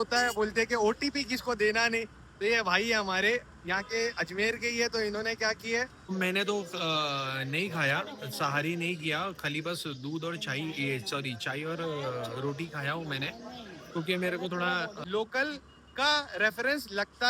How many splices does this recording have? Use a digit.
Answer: 2